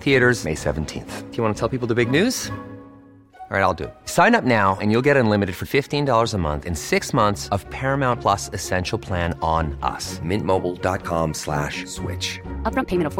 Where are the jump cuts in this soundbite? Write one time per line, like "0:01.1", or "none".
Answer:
none

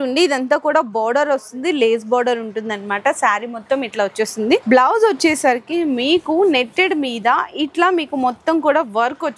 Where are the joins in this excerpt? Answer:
none

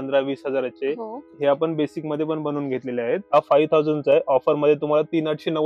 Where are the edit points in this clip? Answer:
0:01.2
0:03.2

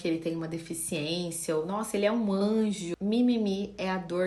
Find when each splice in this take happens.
0:02.8

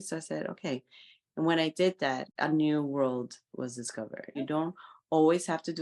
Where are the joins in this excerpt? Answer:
0:02.3
0:04.4

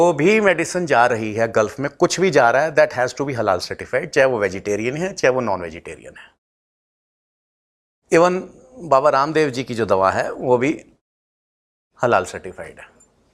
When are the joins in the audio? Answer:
none

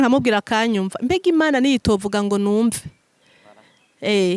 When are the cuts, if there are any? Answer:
none

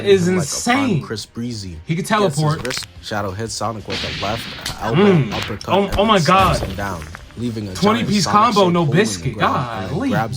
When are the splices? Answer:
0:02.8

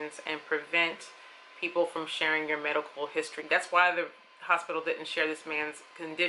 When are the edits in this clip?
0:03.4

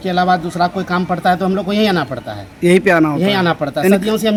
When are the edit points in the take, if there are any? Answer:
none

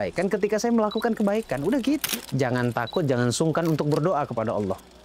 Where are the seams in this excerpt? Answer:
0:02.2

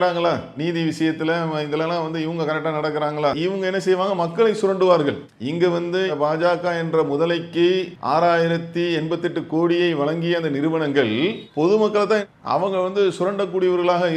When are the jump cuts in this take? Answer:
0:03.4
0:07.9

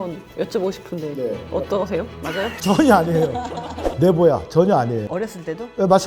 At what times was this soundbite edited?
0:03.8

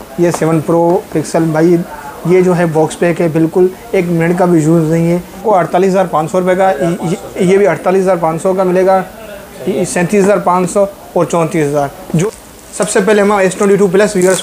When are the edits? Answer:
0:05.4
0:12.2

